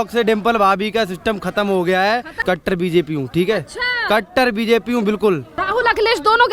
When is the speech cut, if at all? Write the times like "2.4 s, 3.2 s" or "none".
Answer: 2.3 s, 5.6 s